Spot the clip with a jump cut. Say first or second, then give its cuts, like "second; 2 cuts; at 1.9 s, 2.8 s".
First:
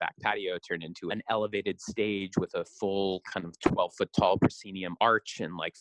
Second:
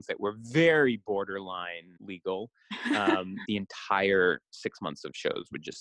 second; 1 cut; at 3.4 s